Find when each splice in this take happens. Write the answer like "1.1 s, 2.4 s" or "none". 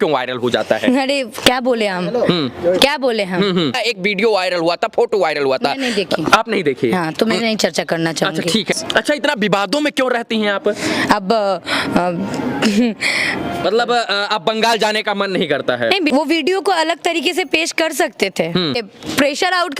3.8 s, 8.8 s, 13.6 s, 16.1 s, 18.9 s